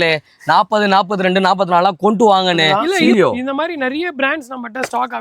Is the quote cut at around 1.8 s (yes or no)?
no